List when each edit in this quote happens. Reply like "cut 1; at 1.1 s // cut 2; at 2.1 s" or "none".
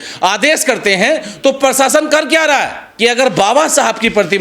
cut 1; at 2.8 s